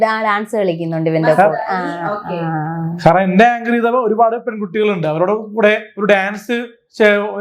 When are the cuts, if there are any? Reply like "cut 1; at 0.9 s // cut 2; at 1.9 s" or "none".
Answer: none